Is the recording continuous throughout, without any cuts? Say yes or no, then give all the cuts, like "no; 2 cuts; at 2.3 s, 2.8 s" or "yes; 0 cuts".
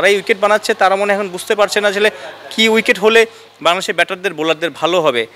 yes; 0 cuts